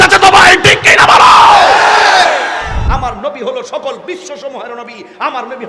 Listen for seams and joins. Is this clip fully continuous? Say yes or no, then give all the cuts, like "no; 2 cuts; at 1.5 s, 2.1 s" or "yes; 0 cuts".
no; 1 cut; at 2.8 s